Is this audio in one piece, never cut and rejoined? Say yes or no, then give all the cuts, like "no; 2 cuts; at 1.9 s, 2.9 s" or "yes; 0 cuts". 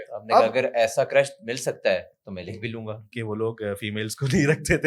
no; 1 cut; at 3.1 s